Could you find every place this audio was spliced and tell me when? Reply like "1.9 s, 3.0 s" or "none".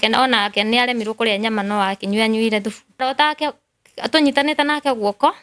3.0 s

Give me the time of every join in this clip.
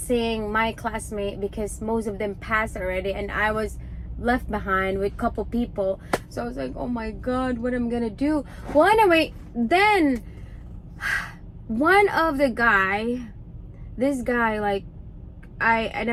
none

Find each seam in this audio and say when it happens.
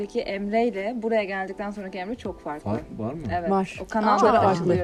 none

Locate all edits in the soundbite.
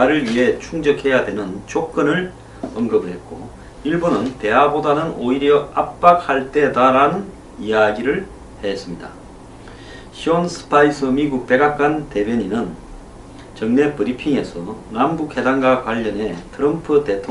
none

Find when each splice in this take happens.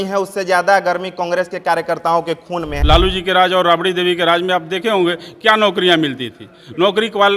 2.7 s

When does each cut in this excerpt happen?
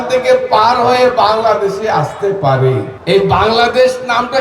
2.9 s

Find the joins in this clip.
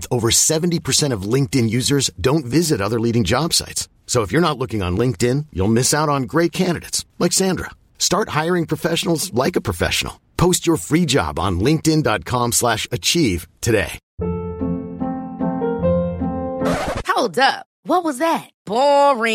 14.0 s

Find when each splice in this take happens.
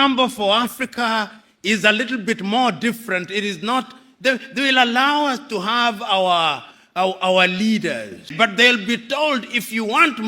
8.3 s

